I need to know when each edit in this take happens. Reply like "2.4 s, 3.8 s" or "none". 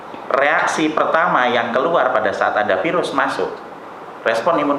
none